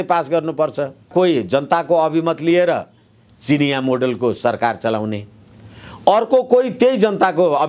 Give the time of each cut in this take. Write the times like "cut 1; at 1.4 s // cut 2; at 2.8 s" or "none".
cut 1; at 1.1 s